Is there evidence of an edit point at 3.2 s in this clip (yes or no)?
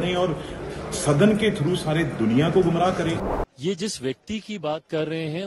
yes